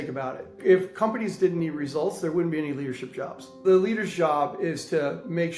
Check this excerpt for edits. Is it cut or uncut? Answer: cut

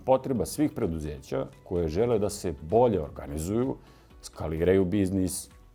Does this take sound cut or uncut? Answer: uncut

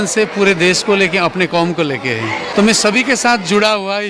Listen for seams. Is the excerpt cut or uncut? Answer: cut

